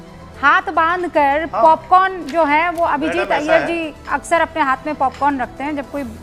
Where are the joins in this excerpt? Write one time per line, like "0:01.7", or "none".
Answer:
none